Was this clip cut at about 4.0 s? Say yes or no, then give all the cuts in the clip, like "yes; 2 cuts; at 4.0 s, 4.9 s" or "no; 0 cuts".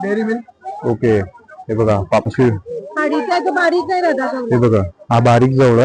no; 1 cut; at 2.3 s